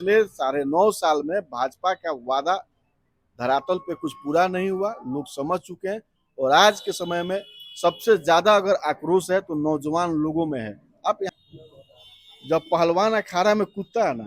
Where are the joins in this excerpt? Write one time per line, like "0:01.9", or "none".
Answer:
0:11.3